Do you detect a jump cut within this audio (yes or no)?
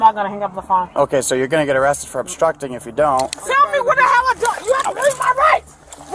yes